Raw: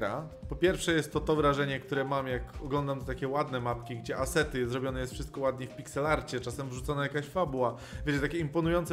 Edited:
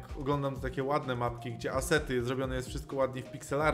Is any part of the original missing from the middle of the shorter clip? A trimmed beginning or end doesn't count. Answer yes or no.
no